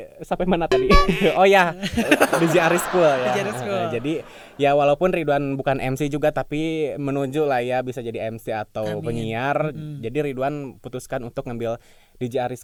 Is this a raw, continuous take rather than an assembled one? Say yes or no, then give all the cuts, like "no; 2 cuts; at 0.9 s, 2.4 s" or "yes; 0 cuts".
yes; 0 cuts